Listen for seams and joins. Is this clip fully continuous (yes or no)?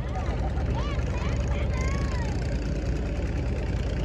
yes